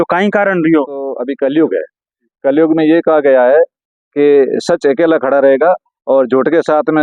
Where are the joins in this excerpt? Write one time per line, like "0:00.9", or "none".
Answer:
0:01.1